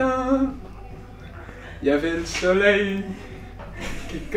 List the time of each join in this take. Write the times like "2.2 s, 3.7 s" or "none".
none